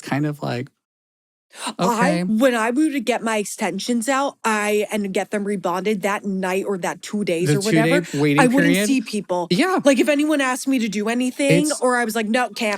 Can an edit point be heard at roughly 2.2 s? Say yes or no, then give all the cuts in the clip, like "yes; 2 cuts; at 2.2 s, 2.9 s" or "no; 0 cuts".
yes; 1 cut; at 2.2 s